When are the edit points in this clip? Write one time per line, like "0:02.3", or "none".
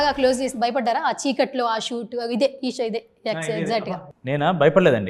0:04.1